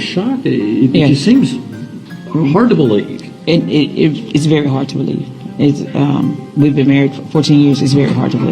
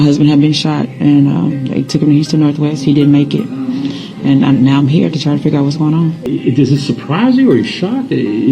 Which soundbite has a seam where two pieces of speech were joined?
second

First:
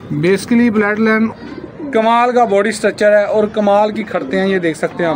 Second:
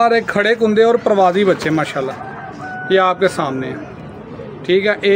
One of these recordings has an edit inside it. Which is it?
first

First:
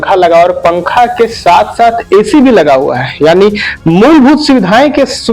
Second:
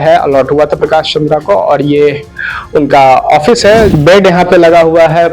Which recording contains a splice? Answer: second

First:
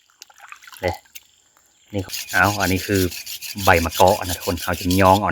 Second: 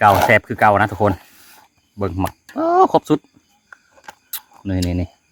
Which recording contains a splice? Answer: first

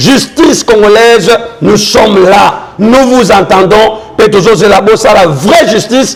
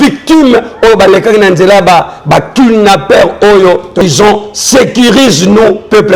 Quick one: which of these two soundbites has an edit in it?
second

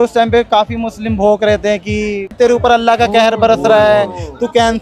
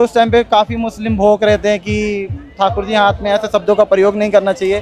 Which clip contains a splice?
first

